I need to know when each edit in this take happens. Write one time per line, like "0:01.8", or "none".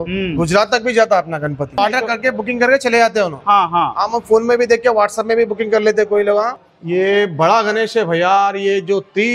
0:01.8
0:06.6